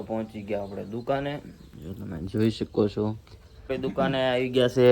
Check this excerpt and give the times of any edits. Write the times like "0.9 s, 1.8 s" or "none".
3.8 s